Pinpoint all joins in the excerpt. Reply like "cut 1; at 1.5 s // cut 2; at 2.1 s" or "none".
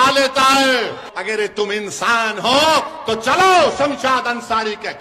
cut 1; at 1.1 s